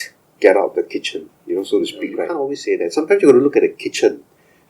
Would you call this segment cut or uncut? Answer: cut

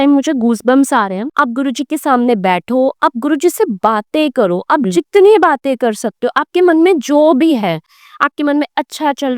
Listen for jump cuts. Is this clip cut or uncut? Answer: cut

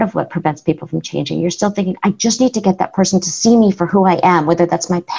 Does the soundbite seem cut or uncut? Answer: cut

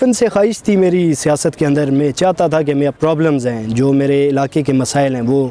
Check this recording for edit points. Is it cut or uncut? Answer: cut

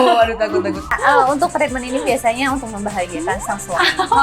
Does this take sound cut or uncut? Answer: cut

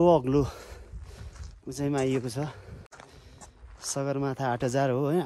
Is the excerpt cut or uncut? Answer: uncut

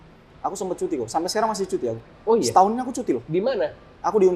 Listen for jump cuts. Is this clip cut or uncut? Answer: uncut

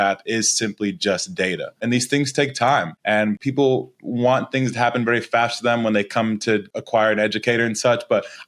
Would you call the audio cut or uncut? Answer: cut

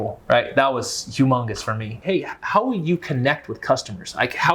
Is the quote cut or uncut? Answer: cut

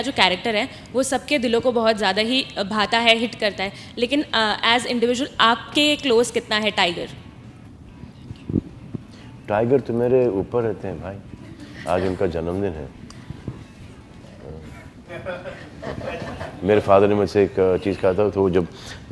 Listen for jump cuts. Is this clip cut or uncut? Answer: uncut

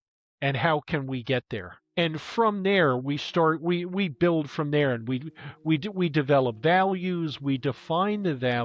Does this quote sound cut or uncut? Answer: cut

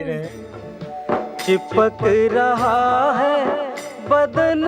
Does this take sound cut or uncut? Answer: uncut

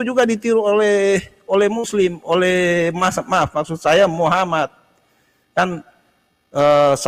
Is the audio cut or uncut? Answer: uncut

